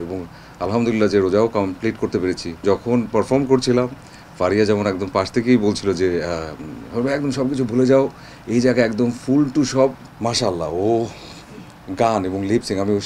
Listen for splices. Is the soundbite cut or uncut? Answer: cut